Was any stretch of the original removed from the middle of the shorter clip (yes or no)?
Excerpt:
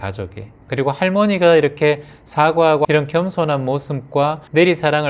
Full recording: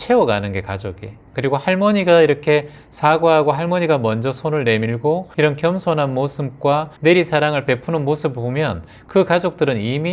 yes